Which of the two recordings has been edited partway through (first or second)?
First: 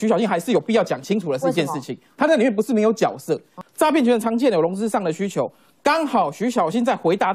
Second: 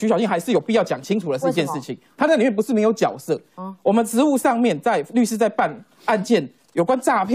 first